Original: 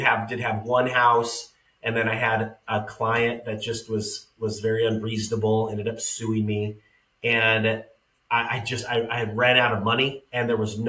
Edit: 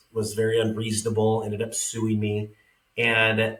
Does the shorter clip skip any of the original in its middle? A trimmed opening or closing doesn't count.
no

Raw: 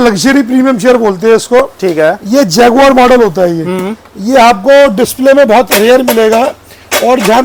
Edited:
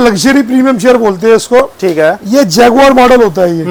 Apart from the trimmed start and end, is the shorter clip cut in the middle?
no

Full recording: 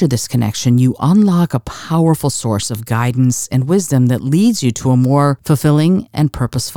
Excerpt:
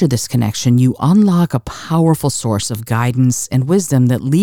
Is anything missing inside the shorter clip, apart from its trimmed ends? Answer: no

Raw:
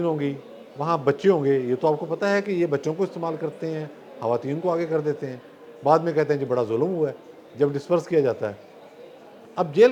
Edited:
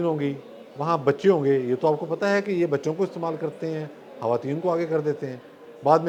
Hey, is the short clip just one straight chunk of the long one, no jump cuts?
yes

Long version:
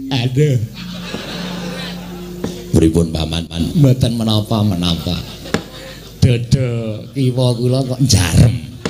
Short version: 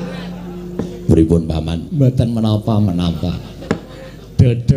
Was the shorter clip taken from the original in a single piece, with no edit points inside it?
no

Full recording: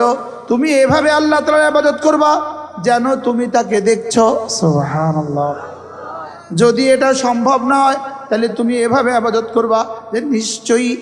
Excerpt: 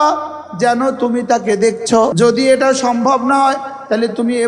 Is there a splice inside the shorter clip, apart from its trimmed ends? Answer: yes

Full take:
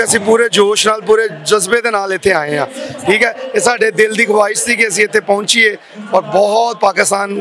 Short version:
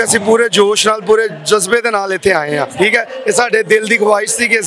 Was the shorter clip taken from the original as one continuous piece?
no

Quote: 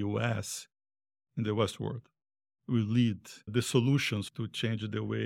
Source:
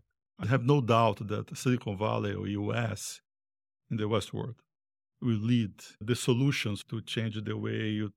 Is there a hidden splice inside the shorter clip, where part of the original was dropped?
no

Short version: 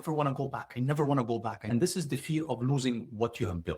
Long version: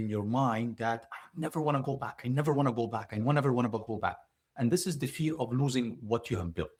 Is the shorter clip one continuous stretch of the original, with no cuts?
no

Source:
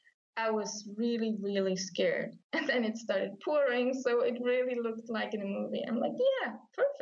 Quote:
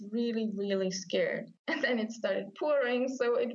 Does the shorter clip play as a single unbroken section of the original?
yes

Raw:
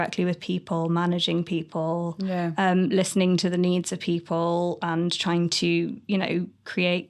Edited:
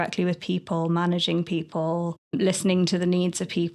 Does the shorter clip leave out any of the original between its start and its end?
yes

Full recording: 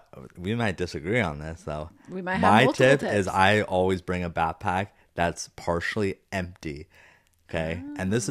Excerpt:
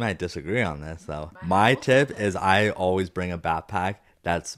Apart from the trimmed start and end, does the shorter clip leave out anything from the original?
yes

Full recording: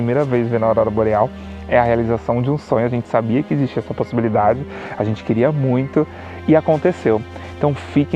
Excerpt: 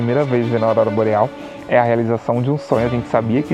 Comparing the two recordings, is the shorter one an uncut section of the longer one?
yes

